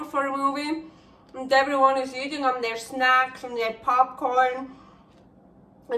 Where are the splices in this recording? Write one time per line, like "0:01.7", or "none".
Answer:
none